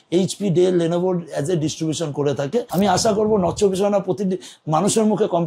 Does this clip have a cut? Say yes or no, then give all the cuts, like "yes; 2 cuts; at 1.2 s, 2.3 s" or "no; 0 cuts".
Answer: yes; 1 cut; at 2.7 s